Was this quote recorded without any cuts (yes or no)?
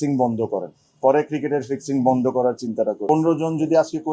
no